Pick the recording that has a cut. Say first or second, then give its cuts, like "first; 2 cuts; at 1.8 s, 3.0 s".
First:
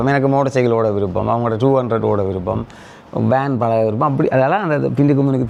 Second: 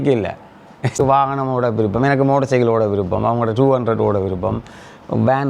second; 1 cut; at 1.0 s